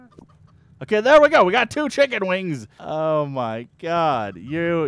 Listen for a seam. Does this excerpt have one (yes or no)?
yes